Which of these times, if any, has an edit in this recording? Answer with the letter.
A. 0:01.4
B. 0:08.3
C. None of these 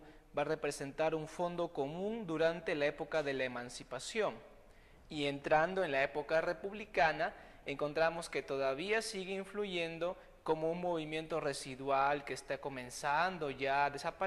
B